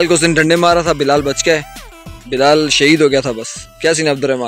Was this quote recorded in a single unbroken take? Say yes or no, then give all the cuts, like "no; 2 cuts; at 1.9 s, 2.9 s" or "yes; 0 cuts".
yes; 0 cuts